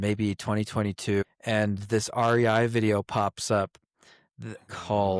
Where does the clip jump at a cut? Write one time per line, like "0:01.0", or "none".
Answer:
0:01.2